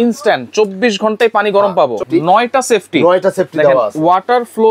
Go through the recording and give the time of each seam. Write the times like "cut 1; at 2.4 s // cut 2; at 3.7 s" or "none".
cut 1; at 2.0 s